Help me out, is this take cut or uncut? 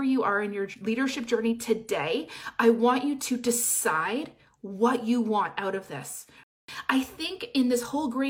cut